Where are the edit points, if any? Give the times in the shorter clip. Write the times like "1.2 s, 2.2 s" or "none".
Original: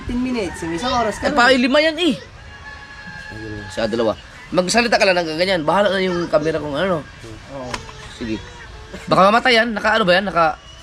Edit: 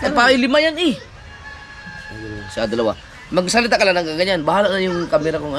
none